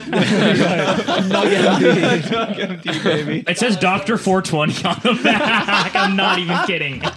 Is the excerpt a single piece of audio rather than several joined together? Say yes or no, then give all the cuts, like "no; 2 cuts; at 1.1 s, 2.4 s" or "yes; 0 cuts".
no; 1 cut; at 3.5 s